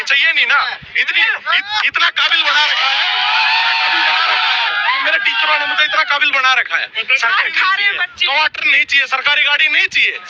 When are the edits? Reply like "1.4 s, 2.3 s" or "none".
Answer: 7.3 s